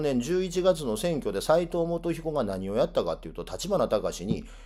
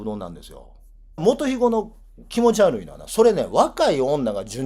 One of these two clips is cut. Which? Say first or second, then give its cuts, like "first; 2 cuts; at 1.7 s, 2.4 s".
second; 1 cut; at 1.2 s